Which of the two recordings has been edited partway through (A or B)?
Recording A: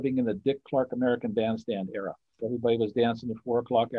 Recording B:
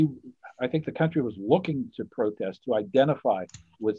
A